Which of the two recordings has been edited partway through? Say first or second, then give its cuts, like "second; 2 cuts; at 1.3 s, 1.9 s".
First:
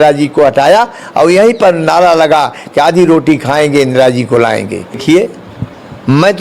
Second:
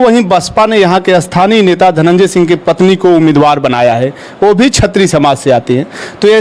first; 1 cut; at 5.0 s